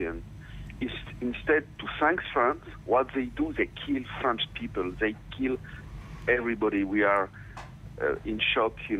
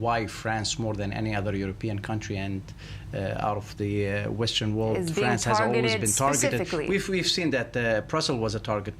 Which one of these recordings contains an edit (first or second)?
first